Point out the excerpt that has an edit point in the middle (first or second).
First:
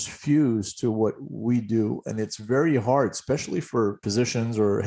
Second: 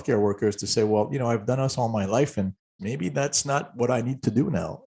second